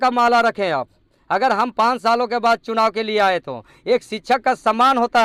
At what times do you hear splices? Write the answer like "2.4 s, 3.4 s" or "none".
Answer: none